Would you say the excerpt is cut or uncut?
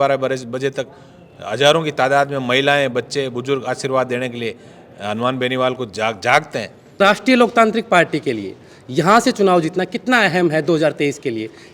cut